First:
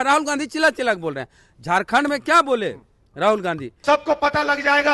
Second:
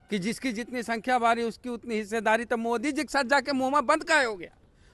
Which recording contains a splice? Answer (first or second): first